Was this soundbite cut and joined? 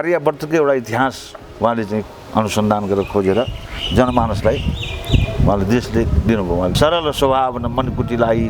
yes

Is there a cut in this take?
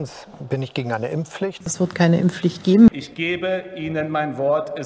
yes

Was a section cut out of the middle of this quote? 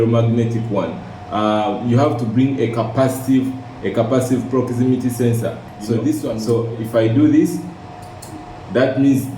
yes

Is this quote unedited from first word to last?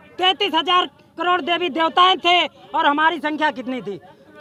yes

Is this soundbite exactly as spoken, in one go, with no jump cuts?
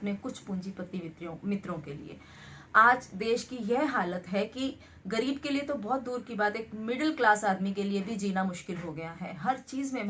yes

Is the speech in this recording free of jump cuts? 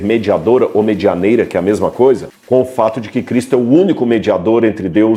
yes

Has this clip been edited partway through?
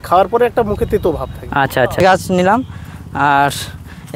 no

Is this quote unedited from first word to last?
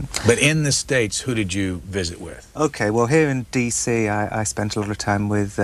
yes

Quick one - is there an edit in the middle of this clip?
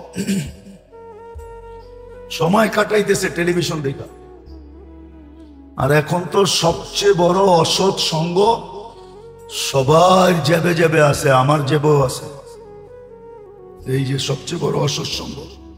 no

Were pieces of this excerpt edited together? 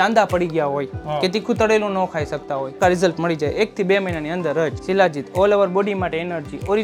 yes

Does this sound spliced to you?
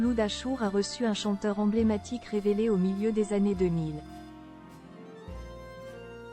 no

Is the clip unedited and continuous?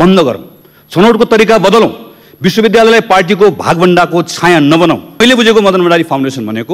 no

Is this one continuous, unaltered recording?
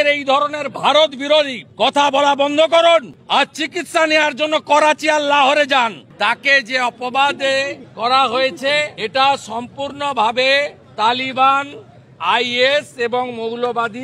no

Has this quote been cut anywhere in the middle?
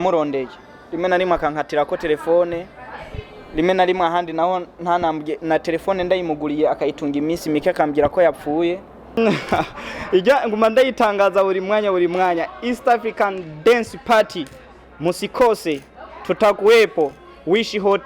yes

